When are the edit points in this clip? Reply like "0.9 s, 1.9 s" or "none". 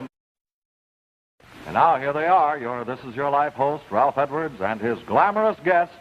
none